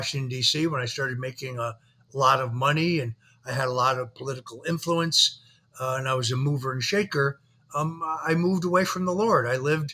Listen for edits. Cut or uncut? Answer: uncut